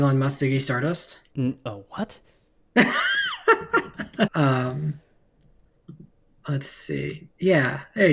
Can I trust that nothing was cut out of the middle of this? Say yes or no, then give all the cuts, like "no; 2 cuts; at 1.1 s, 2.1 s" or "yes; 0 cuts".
no; 1 cut; at 4.3 s